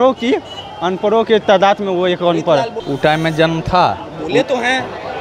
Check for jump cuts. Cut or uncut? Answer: cut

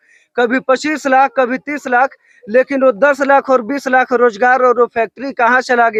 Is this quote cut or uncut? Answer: uncut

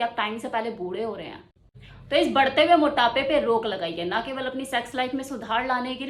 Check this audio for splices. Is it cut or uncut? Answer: uncut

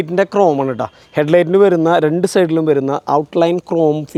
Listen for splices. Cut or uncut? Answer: uncut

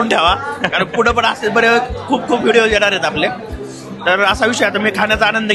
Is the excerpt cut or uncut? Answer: uncut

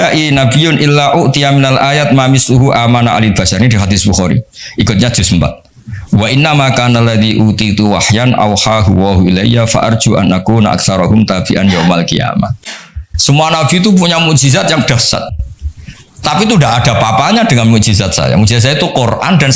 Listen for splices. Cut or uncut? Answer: uncut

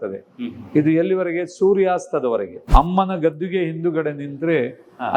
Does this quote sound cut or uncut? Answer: cut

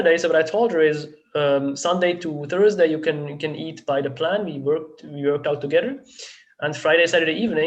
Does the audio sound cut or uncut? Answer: uncut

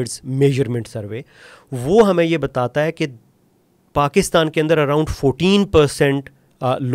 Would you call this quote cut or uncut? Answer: uncut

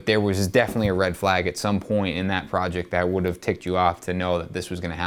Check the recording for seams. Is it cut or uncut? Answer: uncut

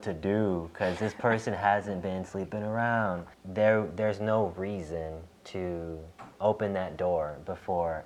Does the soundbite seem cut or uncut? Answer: cut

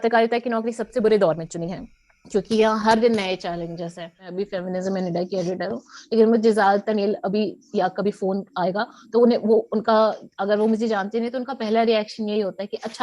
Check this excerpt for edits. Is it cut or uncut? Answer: cut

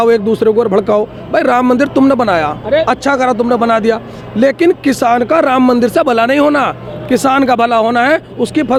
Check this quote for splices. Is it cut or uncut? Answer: uncut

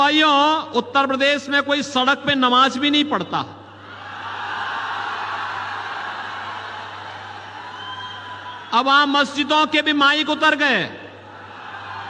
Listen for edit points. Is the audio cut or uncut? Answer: uncut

